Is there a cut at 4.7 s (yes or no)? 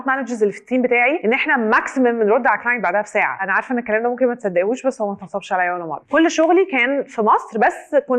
no